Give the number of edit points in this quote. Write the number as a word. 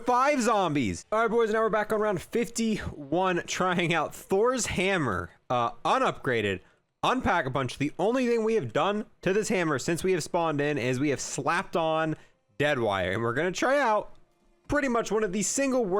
one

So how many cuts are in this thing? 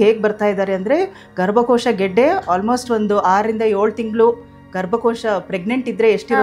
zero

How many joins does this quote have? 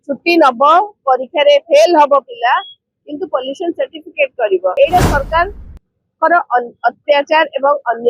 one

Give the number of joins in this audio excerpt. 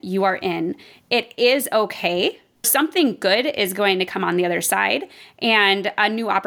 one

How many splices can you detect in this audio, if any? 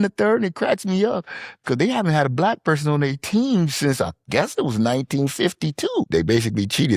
one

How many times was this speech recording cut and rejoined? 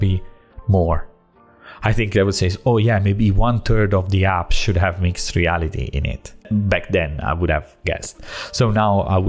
one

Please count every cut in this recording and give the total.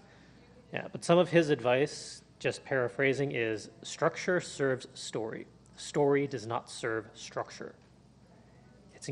zero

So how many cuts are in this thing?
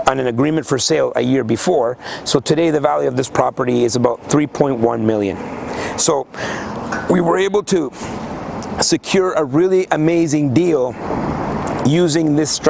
zero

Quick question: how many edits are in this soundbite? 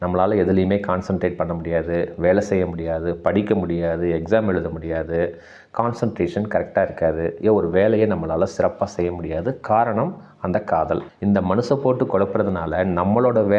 one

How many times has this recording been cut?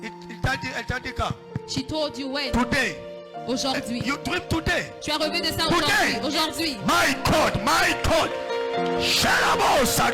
zero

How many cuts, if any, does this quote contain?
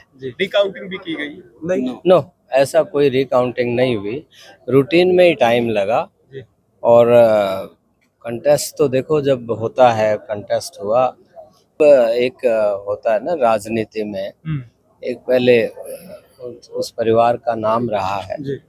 one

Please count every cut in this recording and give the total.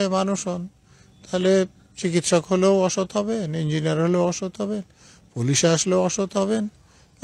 zero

